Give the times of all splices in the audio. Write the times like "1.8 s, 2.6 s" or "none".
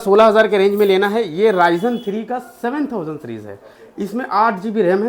none